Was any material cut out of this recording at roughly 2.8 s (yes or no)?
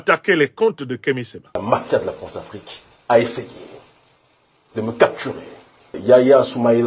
no